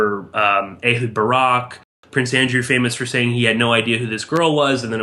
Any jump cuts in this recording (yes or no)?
yes